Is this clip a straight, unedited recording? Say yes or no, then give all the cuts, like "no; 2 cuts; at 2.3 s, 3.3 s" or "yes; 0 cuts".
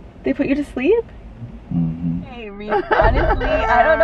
no; 1 cut; at 2.5 s